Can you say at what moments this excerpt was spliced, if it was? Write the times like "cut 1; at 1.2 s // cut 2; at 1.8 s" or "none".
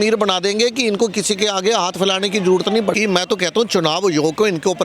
cut 1; at 2.9 s